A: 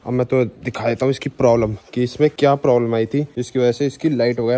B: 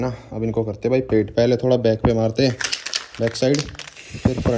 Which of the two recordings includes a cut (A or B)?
A